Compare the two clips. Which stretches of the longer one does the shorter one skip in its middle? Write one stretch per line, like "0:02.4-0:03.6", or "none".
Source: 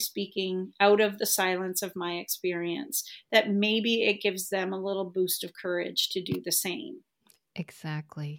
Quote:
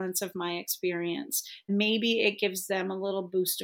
0:03.3-0:03.5